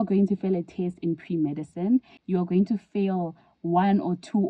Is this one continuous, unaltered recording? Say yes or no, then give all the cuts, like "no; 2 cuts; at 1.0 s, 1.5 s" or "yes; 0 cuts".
yes; 0 cuts